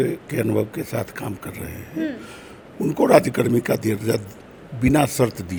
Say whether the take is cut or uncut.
uncut